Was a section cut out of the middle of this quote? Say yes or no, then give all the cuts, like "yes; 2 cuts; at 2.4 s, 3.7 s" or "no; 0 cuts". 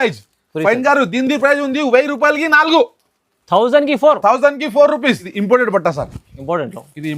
yes; 1 cut; at 5.3 s